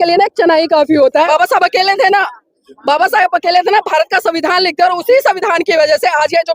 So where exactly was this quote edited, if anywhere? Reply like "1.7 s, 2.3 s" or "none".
1.3 s

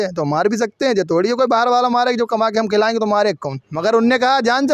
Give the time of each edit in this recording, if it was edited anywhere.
none

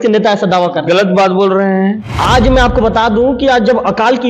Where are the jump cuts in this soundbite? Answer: 2.1 s

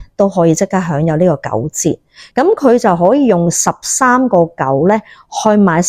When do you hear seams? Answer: 2.1 s

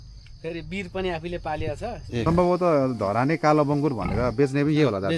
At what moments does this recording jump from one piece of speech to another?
2.2 s

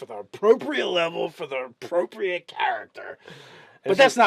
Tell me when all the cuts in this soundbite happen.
2.5 s

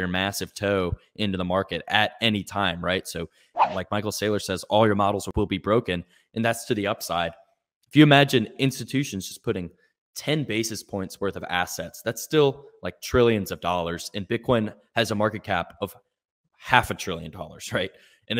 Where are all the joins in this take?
3.6 s, 5.3 s

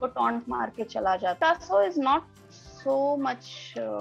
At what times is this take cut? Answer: 1.4 s

